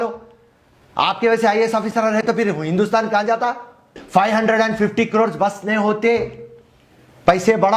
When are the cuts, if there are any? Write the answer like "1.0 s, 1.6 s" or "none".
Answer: 4.0 s